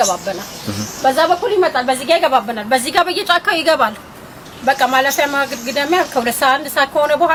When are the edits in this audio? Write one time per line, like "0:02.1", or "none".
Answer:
none